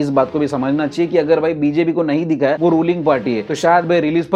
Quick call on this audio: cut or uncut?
uncut